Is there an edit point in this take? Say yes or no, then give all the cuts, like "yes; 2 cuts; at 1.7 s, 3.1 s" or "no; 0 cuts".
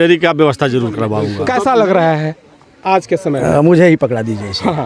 yes; 1 cut; at 1.3 s